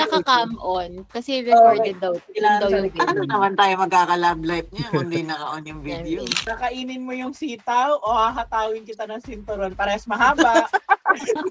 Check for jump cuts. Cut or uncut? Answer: cut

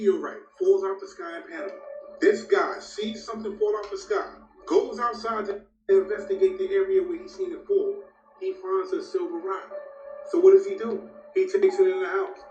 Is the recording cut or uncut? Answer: uncut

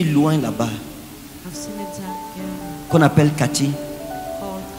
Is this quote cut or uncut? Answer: uncut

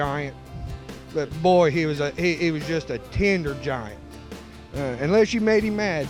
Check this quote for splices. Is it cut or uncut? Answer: uncut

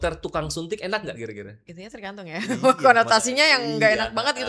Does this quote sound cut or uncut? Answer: uncut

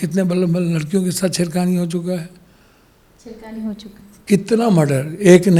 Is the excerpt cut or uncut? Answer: uncut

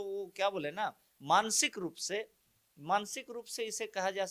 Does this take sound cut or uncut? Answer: uncut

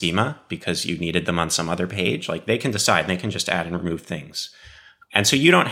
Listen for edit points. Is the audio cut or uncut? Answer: uncut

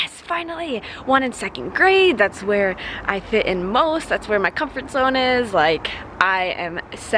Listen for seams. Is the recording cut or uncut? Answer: uncut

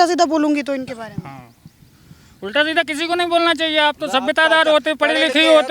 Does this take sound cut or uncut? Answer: uncut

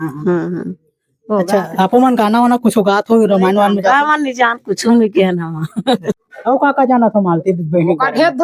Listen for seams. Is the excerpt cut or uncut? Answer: cut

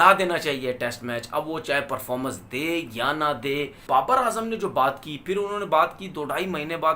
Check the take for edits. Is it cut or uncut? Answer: cut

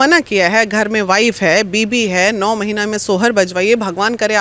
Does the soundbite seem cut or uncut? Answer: uncut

